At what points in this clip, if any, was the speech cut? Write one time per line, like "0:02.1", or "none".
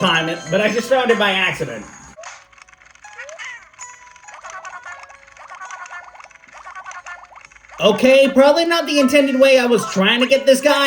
0:02.2